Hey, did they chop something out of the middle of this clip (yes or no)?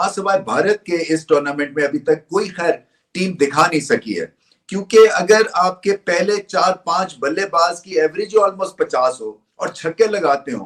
no